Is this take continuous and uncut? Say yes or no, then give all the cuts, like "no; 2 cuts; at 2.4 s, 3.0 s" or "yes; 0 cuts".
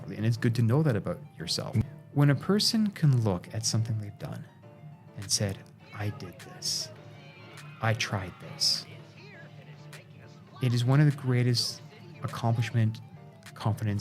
no; 1 cut; at 1.8 s